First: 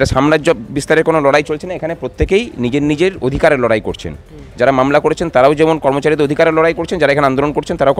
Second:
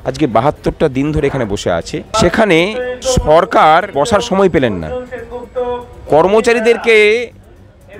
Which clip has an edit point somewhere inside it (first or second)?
second